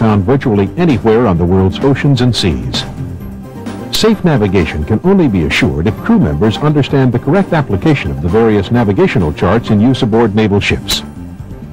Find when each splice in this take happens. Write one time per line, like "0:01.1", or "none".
0:02.7